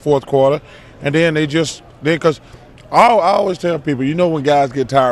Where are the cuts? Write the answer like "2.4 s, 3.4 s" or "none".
2.7 s